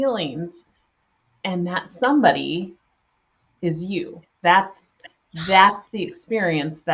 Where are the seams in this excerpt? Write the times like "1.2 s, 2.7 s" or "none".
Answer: none